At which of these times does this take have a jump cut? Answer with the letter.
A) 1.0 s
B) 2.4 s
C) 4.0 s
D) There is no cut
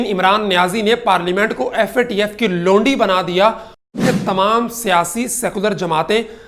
C